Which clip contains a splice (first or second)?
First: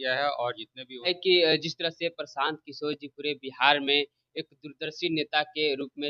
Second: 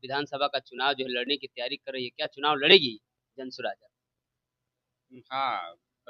first